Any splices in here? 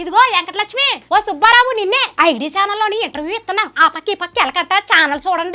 yes; 2 cuts; at 0.9 s, 2.1 s

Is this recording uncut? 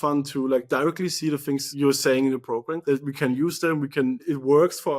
no; 3 cuts; at 1.7 s, 2.7 s, 4.2 s

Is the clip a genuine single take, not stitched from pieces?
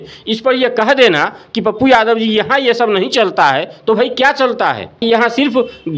no; 1 cut; at 5.0 s

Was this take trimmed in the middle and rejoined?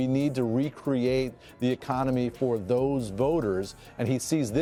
no; 0 cuts

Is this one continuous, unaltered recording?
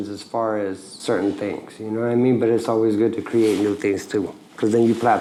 yes; 0 cuts

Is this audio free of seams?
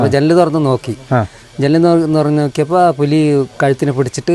yes; 0 cuts

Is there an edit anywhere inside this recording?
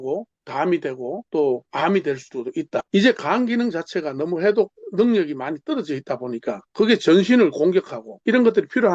yes; 3 cuts; at 2.9 s, 6.6 s, 8.0 s

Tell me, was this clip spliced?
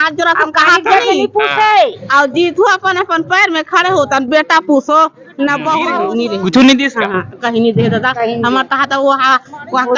yes; 1 cut; at 5.9 s

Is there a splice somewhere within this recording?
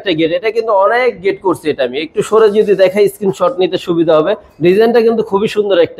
no; 0 cuts

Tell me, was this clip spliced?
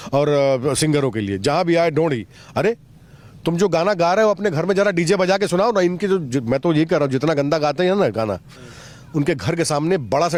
no; 0 cuts

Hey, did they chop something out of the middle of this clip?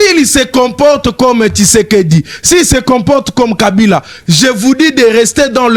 no; 0 cuts

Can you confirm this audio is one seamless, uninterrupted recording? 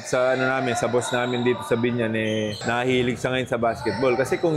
no; 1 cut; at 2.6 s

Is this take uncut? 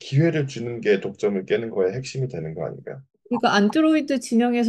no; 1 cut; at 3.1 s

